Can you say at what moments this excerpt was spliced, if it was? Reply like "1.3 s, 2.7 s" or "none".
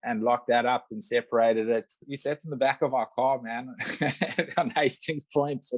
2.1 s